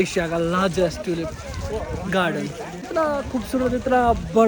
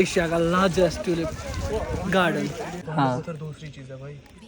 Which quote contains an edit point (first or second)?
second